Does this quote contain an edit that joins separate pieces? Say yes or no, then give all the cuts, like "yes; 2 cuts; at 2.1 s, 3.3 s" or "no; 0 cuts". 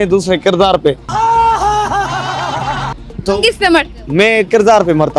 no; 0 cuts